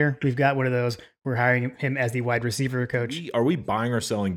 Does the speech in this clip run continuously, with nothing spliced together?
no; 1 cut; at 3.2 s

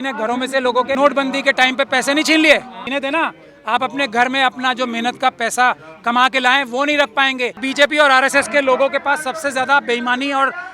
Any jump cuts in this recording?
yes; 3 cuts; at 1.0 s, 2.8 s, 7.6 s

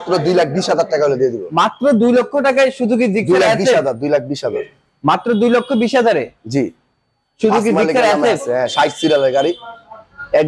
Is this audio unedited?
yes; 0 cuts

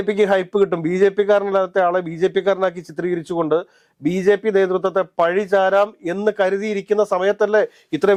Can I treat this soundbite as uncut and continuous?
yes; 0 cuts

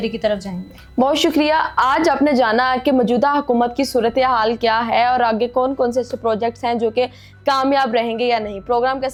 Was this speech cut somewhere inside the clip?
no; 0 cuts

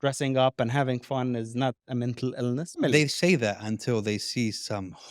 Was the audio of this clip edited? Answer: yes; 1 cut; at 2.8 s

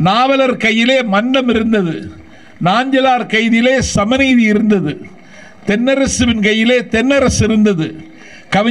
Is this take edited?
no; 0 cuts

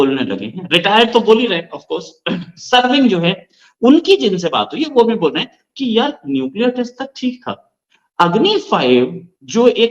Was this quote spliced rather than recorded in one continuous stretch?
no; 0 cuts

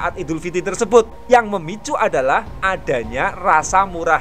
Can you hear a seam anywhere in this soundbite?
yes; 1 cut; at 1.2 s

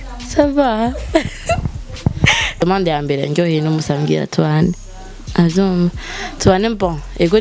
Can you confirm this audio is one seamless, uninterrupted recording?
no; 1 cut; at 2.6 s

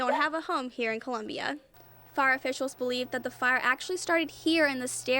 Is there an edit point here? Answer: yes; 1 cut; at 1.7 s

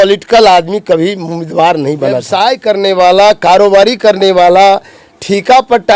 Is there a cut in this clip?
yes; 1 cut; at 2.3 s

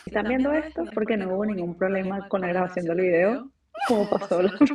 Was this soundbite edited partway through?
yes; 1 cut; at 0.9 s

